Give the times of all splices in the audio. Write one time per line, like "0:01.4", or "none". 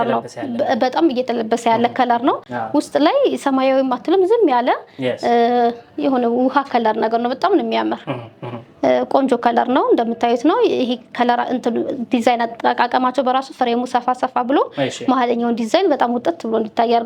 none

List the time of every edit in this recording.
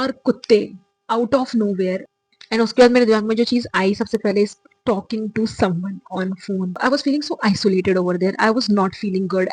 0:02.1
0:06.8

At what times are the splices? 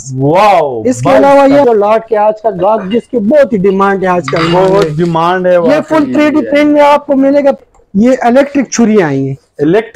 0:01.6
0:07.6

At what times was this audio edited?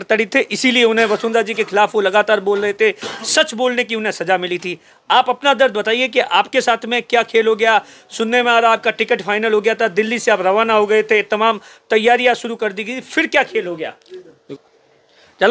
0:14.5

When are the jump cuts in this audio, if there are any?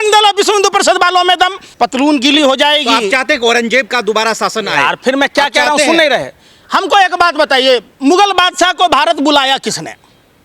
none

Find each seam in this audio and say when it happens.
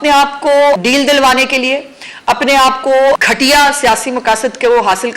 0:00.8
0:03.2

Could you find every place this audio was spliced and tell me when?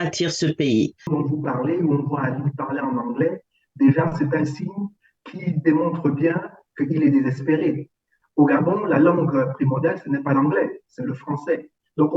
0:01.1

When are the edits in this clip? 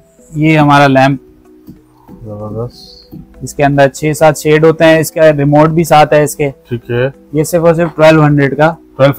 none

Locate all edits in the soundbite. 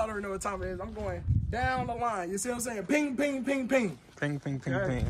none

